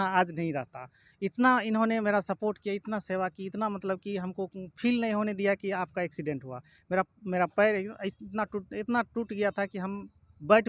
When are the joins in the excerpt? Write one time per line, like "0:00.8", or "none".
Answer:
none